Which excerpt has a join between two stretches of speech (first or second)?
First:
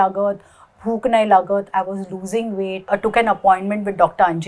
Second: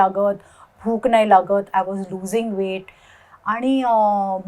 first